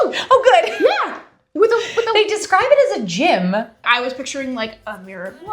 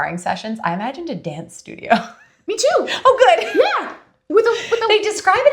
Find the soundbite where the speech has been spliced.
first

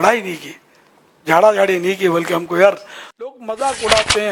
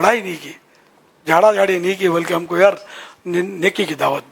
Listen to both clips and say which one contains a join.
first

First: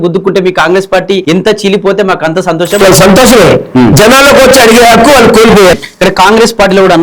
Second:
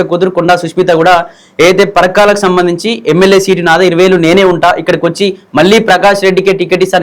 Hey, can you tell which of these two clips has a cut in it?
first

